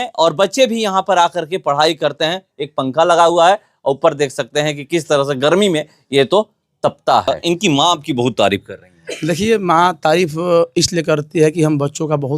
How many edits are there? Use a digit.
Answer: 1